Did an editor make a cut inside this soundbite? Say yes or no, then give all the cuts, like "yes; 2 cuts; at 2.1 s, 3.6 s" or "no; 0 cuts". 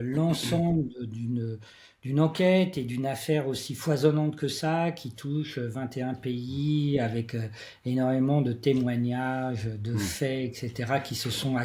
no; 0 cuts